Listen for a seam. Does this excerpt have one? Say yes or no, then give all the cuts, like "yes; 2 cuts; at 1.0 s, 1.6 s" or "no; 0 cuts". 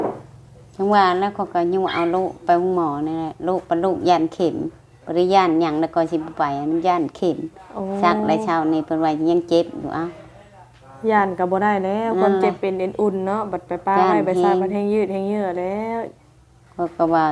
no; 0 cuts